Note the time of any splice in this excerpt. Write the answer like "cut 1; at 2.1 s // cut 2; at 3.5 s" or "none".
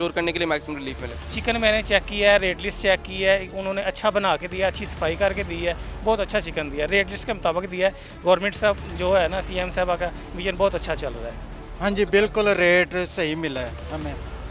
cut 1; at 1.2 s